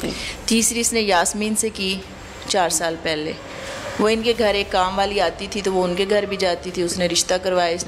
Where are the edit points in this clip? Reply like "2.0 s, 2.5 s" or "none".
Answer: none